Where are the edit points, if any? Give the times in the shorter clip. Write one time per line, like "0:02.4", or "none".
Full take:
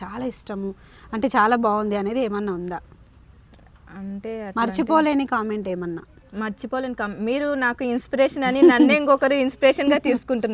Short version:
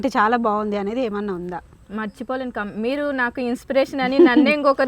0:01.8